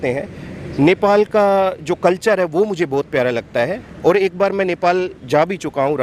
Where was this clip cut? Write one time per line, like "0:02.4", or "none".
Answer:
none

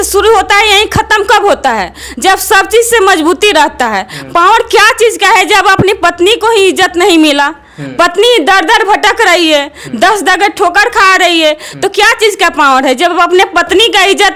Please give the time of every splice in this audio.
none

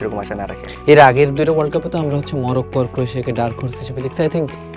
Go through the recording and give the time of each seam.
none

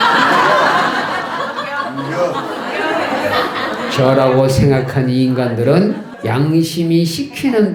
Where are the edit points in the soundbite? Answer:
0:06.1

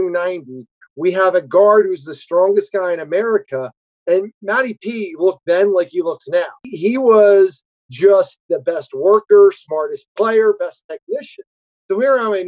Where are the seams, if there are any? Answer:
0:06.7

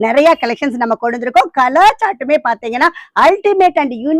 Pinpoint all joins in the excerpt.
none

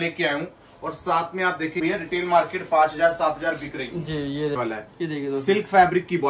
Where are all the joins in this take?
0:01.8
0:04.6

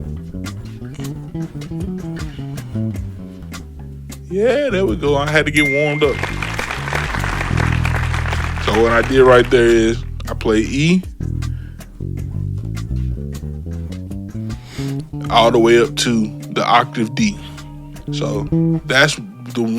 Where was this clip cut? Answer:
0:07.1
0:18.1

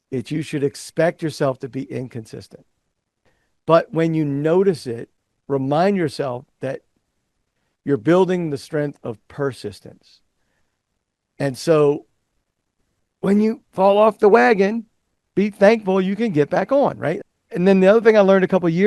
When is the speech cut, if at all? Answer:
0:17.1

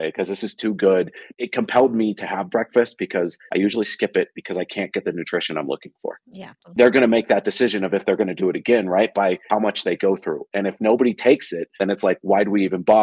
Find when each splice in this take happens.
0:01.2
0:06.6

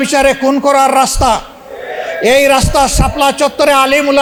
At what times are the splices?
none

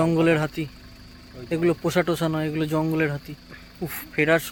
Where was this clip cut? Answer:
none

